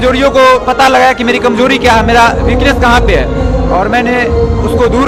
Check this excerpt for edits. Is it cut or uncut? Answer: uncut